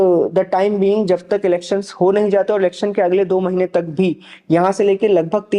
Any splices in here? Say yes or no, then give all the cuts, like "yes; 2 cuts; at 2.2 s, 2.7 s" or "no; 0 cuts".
no; 0 cuts